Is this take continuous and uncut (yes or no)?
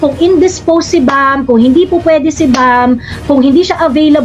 yes